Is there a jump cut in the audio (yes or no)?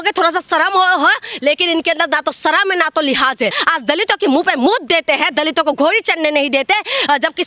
yes